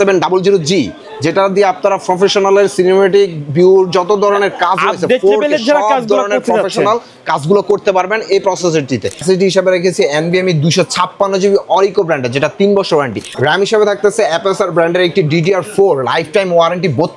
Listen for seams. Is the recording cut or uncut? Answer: cut